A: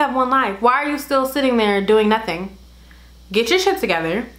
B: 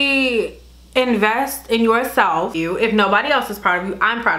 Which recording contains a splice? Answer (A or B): B